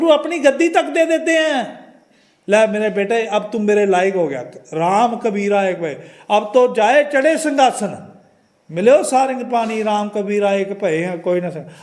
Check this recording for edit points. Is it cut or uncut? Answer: uncut